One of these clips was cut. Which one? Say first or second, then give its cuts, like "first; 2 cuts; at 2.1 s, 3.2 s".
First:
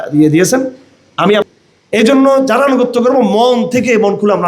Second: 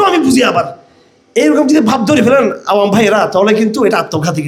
first; 1 cut; at 1.5 s